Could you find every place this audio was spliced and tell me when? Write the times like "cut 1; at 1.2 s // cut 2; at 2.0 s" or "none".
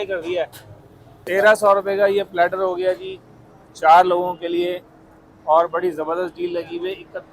cut 1; at 1.2 s